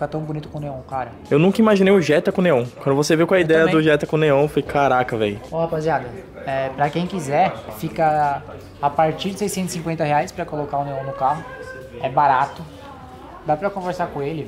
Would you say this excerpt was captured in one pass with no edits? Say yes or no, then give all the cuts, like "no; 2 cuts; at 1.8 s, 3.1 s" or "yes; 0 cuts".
yes; 0 cuts